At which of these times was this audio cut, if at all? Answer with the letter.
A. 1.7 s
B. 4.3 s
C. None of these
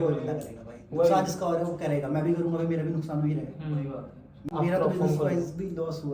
B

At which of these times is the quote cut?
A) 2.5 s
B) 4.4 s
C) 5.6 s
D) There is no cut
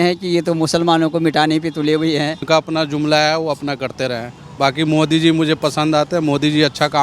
A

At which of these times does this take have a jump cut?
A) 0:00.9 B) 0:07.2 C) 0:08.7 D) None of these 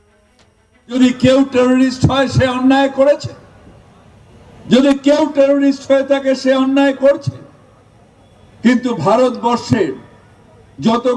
A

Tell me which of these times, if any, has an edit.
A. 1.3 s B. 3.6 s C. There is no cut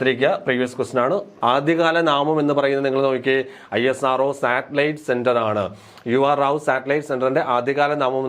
A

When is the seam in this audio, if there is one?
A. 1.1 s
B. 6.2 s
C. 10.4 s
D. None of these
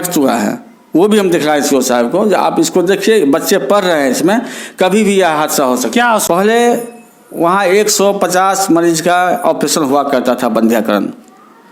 B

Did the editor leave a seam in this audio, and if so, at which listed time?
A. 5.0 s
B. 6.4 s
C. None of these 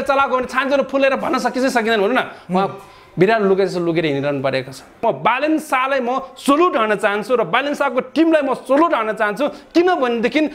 A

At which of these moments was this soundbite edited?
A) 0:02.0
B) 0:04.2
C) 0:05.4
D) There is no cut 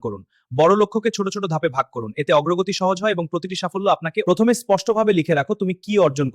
B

